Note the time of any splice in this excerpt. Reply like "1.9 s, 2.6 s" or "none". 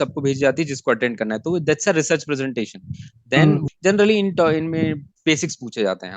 3.6 s